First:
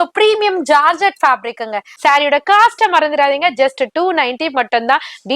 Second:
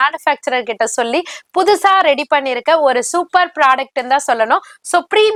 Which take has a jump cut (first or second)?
first